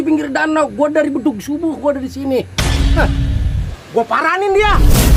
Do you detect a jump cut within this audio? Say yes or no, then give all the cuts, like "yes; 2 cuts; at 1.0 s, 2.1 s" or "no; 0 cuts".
yes; 1 cut; at 3.6 s